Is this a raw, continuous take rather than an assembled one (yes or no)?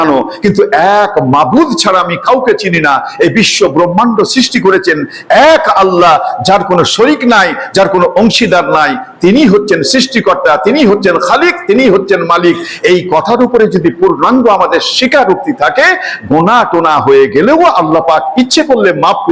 yes